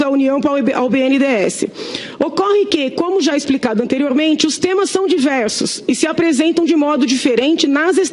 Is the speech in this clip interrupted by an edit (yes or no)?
no